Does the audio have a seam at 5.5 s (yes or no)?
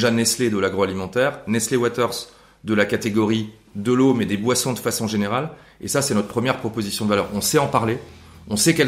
no